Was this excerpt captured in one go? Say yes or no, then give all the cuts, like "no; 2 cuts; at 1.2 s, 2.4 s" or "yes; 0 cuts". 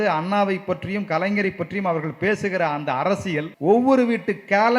no; 1 cut; at 3.5 s